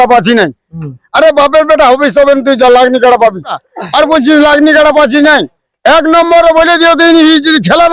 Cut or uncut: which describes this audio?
cut